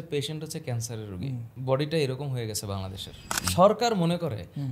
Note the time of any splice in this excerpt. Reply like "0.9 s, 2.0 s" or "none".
1.5 s, 3.5 s